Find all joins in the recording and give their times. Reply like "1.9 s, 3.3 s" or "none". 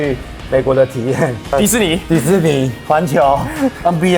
1.5 s